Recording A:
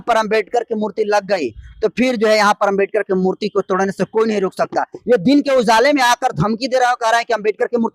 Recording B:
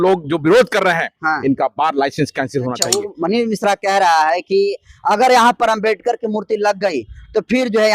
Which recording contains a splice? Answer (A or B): B